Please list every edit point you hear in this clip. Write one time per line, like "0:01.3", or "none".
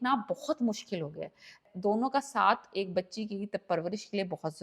0:01.6